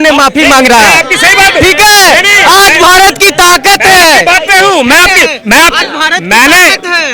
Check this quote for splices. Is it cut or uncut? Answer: uncut